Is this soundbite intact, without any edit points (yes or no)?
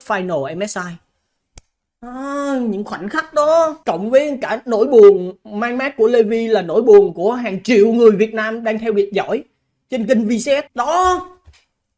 no